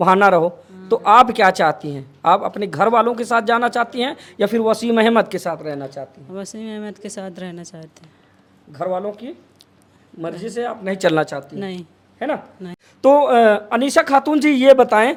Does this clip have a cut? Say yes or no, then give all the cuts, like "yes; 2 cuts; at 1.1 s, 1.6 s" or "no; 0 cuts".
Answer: no; 0 cuts